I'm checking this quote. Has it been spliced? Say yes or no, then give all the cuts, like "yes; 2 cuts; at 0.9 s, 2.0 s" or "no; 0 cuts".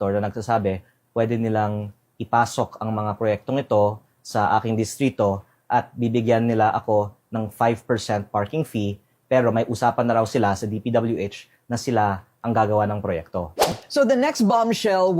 yes; 1 cut; at 13.7 s